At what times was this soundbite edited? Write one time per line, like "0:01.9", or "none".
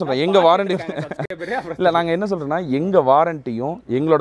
none